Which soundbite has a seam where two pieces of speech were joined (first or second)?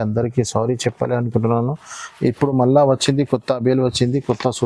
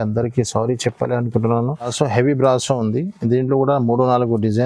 second